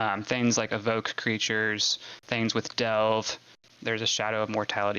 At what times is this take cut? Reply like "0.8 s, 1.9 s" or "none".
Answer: 3.6 s